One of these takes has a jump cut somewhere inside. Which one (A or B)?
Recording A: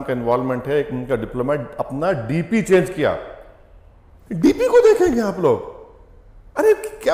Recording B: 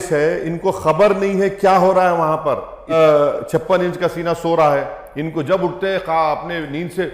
B